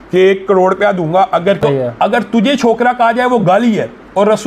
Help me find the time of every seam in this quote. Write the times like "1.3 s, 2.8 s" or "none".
1.6 s